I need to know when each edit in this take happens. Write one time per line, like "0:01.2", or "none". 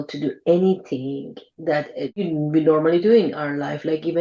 0:02.2